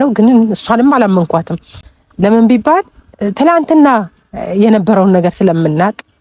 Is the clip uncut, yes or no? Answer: yes